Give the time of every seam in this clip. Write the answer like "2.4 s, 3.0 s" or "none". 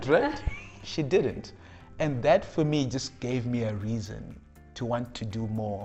none